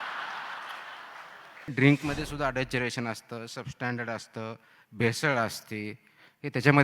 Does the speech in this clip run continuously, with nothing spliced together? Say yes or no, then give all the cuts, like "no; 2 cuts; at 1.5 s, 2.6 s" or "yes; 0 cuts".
no; 1 cut; at 1.7 s